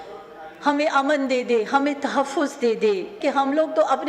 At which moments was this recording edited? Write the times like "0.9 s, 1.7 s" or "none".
3.2 s